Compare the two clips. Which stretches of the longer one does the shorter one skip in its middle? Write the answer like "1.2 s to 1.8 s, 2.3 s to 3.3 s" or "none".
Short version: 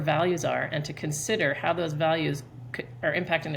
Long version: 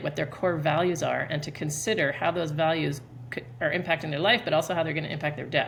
none